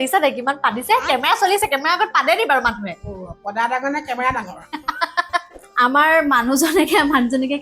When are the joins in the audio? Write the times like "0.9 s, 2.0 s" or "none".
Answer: 5.6 s